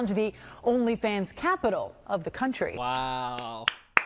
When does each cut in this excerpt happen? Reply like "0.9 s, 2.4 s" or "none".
2.8 s

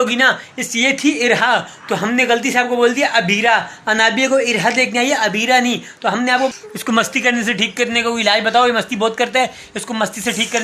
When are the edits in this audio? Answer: 6.5 s

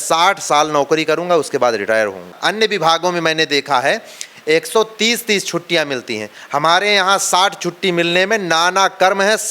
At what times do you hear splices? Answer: 2.4 s

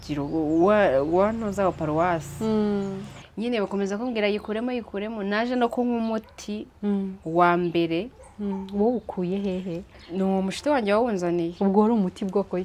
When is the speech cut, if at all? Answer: 3.1 s

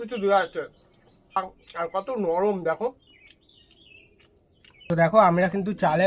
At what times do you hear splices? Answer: 1.4 s, 4.7 s

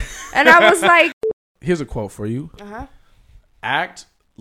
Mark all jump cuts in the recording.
1.2 s

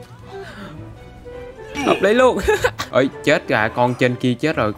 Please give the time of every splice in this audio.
2.8 s

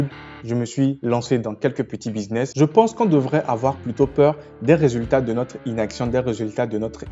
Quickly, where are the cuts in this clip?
2.5 s

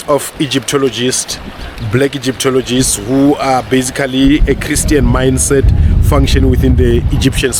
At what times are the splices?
none

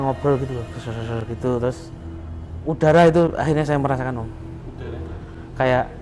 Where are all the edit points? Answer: none

